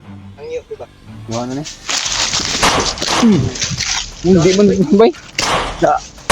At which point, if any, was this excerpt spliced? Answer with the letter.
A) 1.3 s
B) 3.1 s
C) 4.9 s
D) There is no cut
A